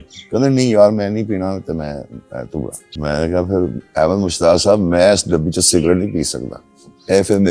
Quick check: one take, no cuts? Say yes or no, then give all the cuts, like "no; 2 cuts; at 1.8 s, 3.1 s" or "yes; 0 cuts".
no; 1 cut; at 2.8 s